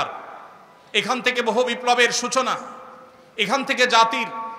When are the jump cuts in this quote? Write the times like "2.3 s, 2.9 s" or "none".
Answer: none